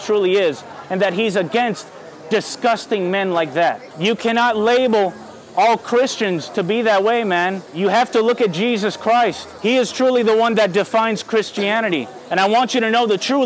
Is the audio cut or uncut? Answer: cut